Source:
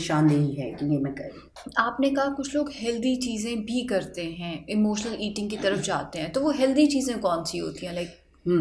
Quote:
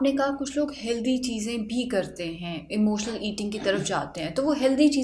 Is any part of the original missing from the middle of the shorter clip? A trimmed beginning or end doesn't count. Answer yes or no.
no